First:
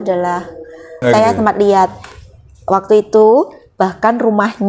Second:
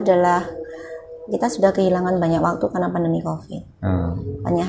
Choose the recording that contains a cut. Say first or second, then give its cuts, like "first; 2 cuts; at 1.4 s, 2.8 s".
first; 1 cut; at 1.0 s